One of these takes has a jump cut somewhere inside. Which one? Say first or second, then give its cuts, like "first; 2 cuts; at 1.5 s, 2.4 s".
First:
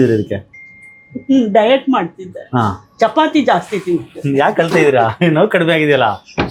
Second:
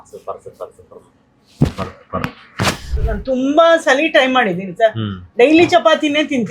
second; 1 cut; at 2.9 s